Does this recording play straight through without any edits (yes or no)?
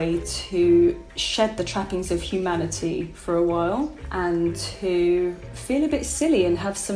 no